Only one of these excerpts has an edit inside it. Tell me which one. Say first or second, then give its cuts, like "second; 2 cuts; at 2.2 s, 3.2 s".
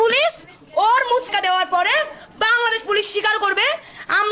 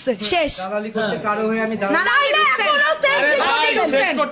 first; 1 cut; at 1.3 s